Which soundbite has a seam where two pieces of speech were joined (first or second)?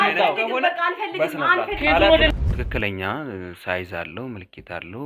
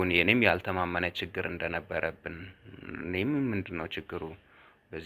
first